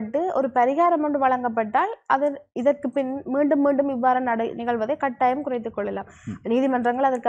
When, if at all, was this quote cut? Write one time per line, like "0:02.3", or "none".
none